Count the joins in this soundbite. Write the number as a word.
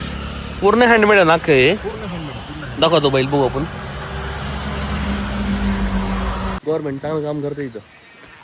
one